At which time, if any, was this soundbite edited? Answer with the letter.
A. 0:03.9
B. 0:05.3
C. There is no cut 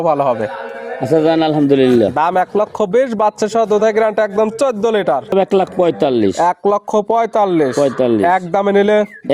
B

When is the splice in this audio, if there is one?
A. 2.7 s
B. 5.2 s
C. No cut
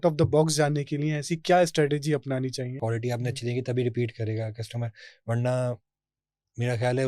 A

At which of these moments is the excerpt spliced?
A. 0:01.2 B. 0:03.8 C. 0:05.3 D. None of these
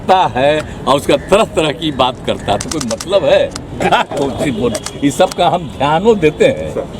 B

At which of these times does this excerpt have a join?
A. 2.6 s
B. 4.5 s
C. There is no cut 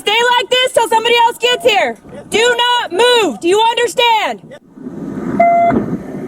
A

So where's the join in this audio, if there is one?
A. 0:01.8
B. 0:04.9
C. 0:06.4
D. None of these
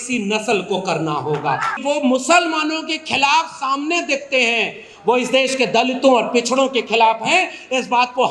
A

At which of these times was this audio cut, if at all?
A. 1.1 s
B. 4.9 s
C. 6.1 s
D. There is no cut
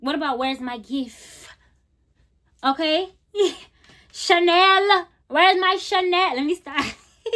D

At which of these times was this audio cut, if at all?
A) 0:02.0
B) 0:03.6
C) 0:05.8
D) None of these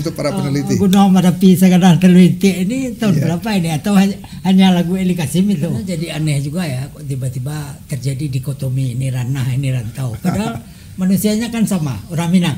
C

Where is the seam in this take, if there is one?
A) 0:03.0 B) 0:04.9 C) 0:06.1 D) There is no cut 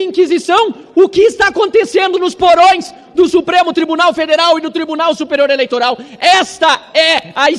D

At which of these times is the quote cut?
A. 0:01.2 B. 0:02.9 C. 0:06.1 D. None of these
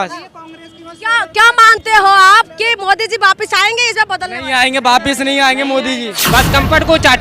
C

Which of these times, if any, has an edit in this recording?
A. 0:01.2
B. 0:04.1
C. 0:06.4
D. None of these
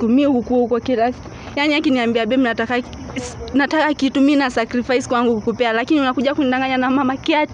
D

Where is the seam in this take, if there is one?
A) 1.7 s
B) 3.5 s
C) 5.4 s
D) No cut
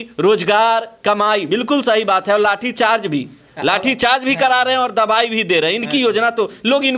D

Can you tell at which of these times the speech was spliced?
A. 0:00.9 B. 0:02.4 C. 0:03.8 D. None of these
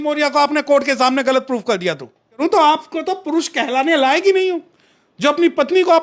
B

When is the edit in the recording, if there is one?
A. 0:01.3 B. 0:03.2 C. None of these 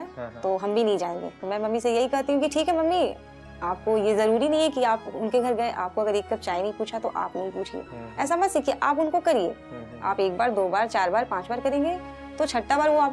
A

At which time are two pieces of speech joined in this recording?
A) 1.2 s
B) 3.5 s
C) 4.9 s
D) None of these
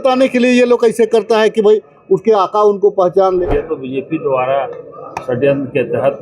B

